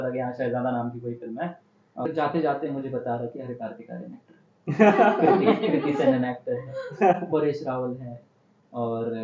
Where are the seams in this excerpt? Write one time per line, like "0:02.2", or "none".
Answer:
0:02.1